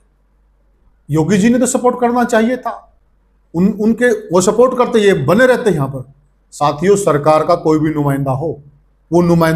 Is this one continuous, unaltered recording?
yes; 0 cuts

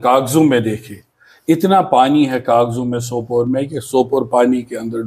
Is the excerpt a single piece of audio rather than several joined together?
yes; 0 cuts

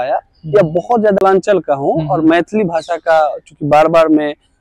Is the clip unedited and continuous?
no; 1 cut; at 1.2 s

